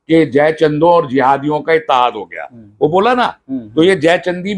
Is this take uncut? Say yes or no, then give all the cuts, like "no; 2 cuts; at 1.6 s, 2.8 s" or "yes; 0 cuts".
yes; 0 cuts